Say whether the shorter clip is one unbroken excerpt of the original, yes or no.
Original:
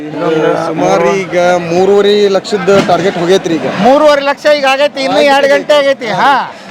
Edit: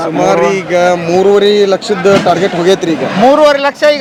yes